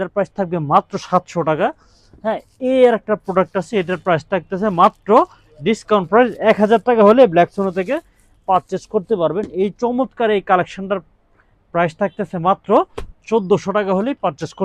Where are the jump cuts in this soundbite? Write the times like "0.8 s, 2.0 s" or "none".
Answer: none